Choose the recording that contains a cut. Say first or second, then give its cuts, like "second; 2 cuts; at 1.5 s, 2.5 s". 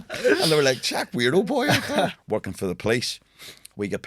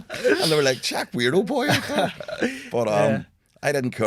first; 1 cut; at 2.2 s